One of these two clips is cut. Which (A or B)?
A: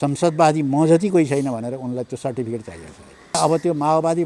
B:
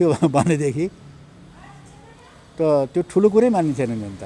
A